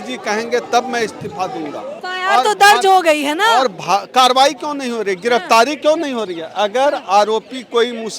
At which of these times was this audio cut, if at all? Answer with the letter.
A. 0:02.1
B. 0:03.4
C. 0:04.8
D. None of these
A